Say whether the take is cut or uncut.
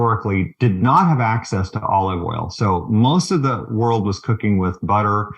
uncut